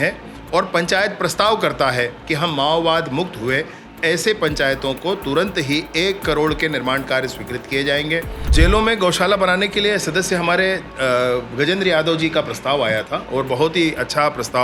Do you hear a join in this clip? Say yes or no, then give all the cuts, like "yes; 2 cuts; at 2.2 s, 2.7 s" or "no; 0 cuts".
yes; 1 cut; at 8.5 s